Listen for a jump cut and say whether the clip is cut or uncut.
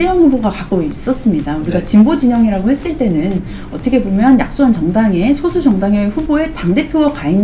uncut